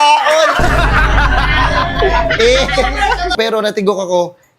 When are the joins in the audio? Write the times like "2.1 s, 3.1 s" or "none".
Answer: 3.4 s